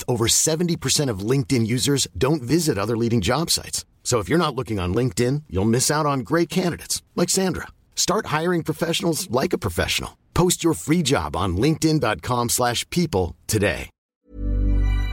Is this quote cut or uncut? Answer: cut